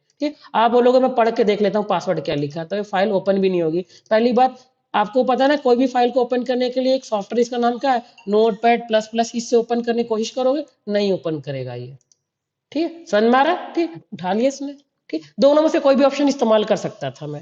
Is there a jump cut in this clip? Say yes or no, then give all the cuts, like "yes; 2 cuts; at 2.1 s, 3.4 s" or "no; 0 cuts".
yes; 1 cut; at 14.1 s